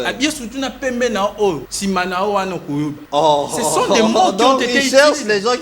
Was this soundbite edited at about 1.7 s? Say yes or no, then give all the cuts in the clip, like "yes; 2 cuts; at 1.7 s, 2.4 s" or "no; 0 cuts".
yes; 2 cuts; at 1.7 s, 3.0 s